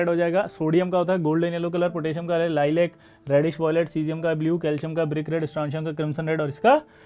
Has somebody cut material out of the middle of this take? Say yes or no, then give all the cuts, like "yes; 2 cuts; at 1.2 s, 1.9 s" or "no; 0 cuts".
no; 0 cuts